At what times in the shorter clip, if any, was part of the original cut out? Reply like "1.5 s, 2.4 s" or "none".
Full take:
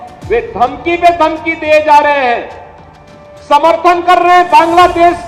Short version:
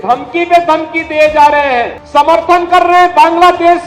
2.0 s